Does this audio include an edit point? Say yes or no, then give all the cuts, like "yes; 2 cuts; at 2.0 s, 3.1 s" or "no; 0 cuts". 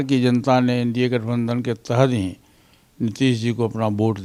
no; 0 cuts